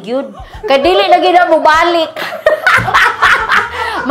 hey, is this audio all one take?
yes; 0 cuts

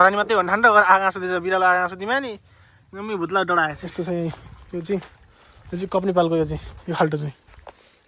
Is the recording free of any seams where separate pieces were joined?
no; 1 cut; at 3.8 s

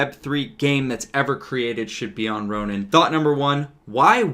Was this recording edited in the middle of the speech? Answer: yes; 1 cut; at 2.9 s

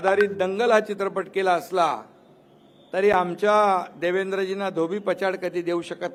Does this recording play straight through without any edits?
yes; 0 cuts

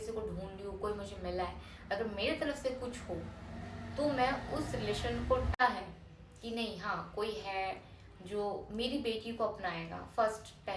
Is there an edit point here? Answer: yes; 1 cut; at 5.6 s

